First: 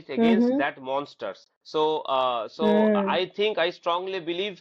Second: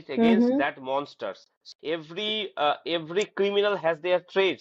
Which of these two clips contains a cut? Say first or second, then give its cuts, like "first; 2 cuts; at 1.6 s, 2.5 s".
second; 1 cut; at 1.6 s